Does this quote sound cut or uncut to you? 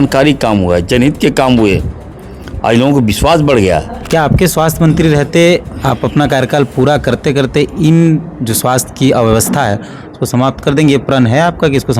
cut